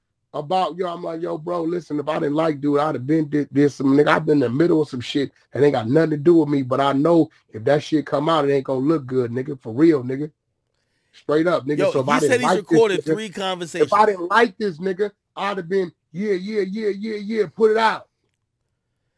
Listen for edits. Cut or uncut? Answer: uncut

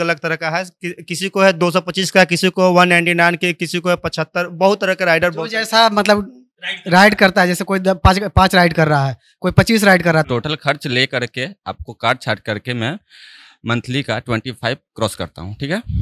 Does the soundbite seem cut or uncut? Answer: cut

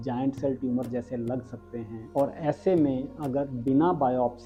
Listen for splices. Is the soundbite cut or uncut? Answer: uncut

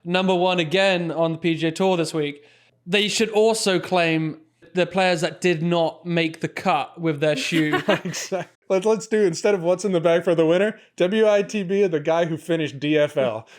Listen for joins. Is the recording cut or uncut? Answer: cut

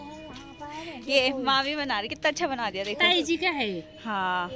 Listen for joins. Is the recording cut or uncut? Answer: uncut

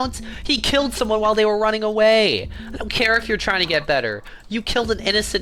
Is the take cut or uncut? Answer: uncut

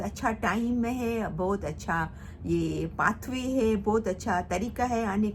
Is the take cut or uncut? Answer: uncut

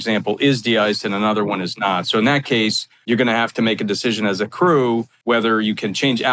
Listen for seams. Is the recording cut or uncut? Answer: cut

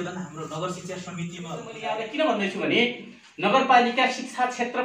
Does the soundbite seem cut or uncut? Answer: cut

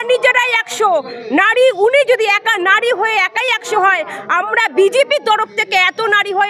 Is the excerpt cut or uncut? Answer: uncut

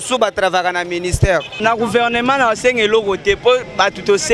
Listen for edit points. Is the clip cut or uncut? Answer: cut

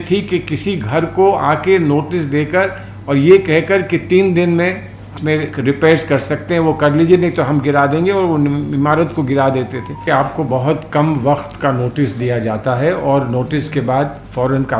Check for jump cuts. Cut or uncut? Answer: cut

